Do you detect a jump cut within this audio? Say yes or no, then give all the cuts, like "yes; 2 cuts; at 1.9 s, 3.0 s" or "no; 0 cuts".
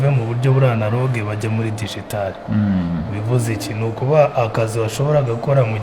no; 0 cuts